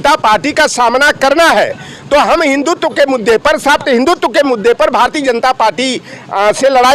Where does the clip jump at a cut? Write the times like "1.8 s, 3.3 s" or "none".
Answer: none